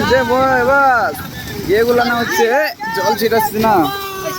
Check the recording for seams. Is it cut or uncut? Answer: uncut